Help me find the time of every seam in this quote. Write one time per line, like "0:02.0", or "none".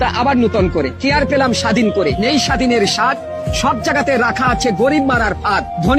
none